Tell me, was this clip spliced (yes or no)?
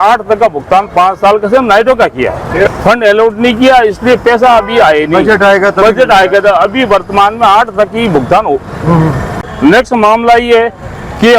yes